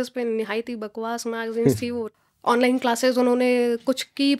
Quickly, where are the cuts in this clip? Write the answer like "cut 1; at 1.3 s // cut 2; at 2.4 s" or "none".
cut 1; at 2.2 s